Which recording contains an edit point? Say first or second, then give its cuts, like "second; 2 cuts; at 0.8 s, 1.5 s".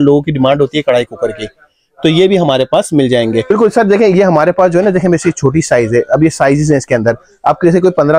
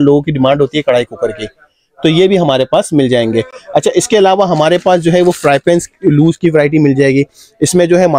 first; 1 cut; at 3.5 s